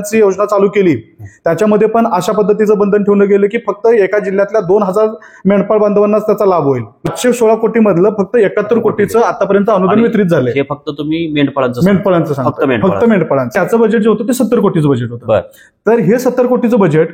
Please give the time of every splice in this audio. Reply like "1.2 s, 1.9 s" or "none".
7.1 s, 13.6 s